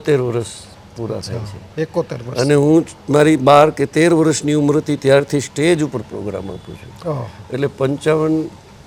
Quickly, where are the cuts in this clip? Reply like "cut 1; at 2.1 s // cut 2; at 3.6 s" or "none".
none

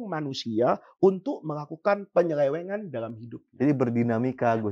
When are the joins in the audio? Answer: none

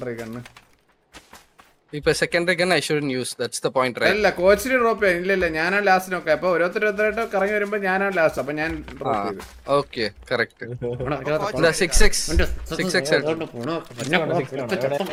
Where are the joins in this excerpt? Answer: none

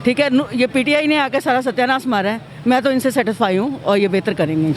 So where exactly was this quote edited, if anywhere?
none

